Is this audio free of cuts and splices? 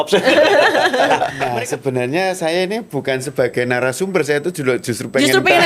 no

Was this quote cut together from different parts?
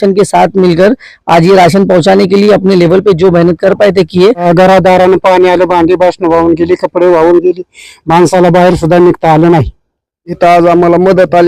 yes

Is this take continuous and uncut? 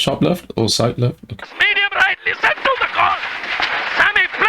no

